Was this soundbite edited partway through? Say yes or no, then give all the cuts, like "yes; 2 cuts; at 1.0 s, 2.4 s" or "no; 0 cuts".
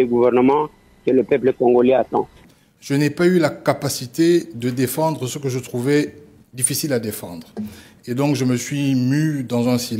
yes; 1 cut; at 2.4 s